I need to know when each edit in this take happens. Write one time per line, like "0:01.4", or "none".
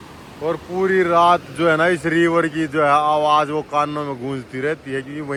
none